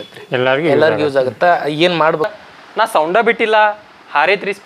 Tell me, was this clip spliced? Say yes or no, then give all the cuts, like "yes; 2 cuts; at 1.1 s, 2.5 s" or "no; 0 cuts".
yes; 1 cut; at 2.3 s